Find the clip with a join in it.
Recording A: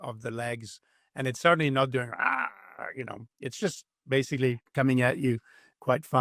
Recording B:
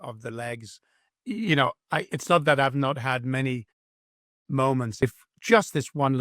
B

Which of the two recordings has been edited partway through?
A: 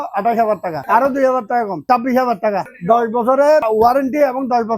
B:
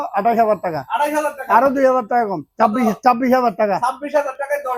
A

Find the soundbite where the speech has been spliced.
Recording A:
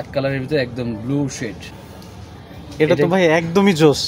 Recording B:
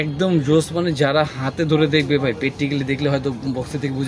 A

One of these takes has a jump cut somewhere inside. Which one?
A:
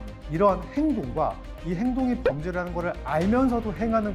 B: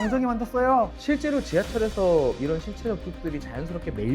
B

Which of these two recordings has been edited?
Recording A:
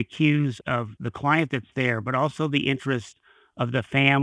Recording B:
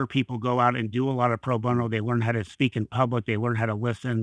A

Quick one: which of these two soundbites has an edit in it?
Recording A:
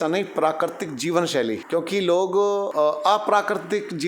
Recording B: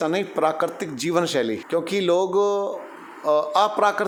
A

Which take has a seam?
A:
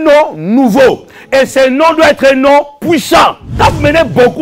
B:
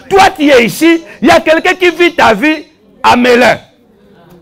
A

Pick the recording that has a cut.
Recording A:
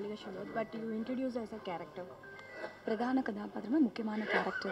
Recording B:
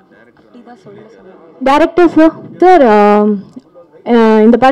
B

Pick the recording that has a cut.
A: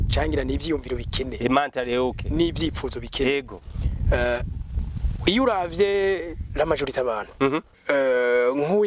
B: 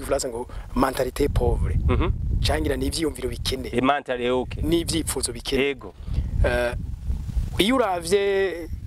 A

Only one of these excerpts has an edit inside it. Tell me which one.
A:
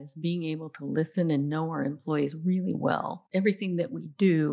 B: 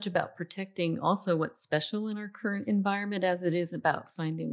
A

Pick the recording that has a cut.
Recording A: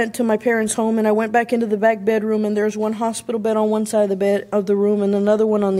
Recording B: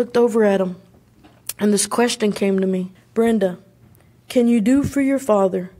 B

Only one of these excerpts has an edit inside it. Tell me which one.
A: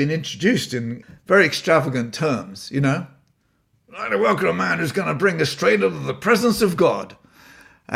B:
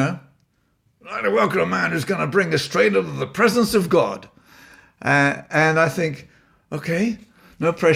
A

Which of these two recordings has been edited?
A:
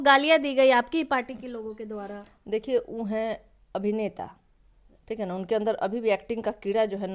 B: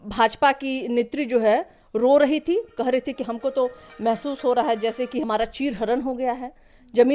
B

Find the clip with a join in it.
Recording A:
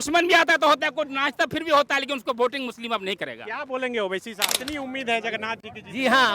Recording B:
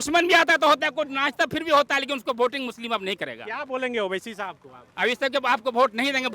A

